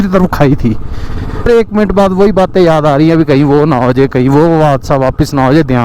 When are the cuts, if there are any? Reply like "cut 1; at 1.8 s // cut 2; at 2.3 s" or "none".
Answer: cut 1; at 1.5 s